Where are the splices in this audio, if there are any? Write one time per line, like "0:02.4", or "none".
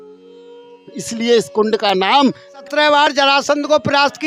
none